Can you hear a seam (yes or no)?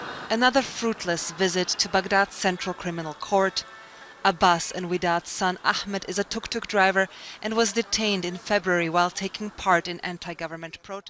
no